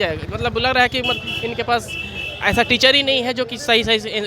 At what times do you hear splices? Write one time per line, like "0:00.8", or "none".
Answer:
none